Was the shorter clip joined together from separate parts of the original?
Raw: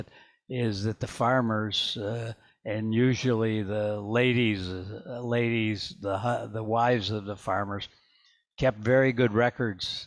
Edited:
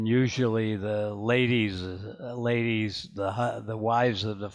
no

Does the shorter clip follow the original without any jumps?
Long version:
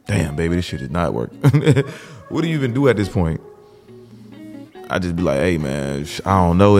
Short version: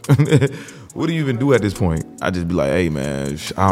no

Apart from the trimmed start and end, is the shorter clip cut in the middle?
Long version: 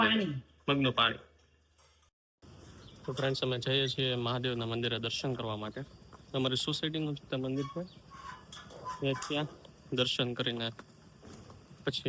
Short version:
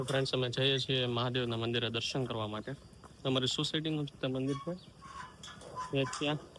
no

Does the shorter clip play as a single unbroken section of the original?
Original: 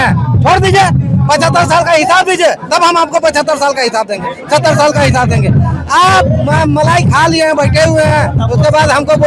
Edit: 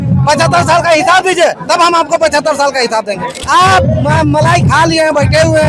no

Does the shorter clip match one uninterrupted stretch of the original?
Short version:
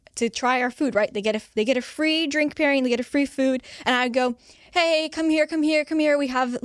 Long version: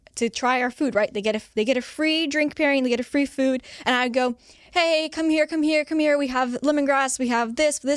yes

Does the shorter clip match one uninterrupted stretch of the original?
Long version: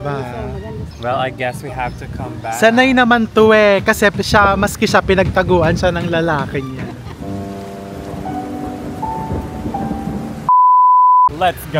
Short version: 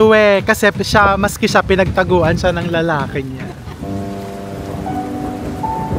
yes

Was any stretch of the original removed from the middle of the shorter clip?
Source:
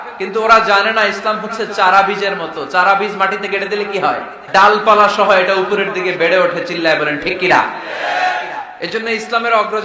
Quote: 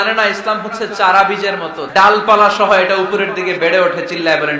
yes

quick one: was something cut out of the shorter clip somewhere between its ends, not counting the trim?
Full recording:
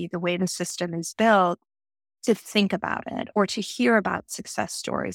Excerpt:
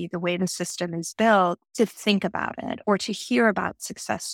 yes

